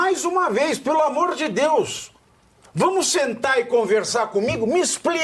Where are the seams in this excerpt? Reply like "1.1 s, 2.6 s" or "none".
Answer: none

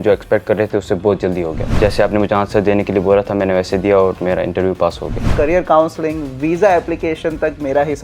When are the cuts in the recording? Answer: 1.8 s, 5.3 s

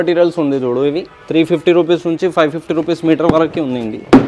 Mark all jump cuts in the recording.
none

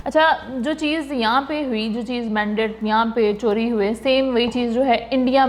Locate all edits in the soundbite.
none

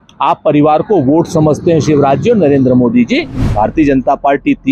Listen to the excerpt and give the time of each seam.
3.4 s

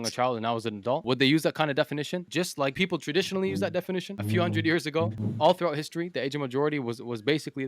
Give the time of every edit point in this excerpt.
1.0 s, 2.7 s, 4.1 s, 5.2 s

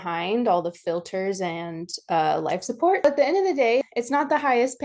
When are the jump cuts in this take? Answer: 3.0 s

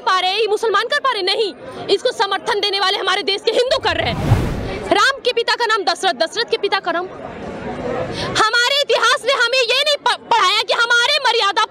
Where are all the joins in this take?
4.3 s

